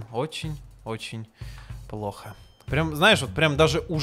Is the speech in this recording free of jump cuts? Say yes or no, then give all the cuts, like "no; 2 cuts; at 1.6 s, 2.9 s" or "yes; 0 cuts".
yes; 0 cuts